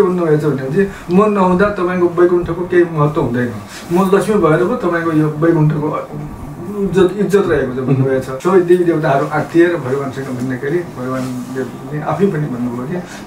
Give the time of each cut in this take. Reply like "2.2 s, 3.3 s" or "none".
8.3 s